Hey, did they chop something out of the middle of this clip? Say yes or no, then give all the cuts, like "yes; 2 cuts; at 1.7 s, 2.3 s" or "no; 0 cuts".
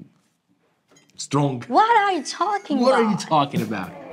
no; 0 cuts